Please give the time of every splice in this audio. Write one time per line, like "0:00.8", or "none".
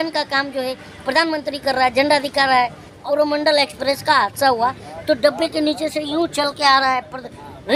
0:03.0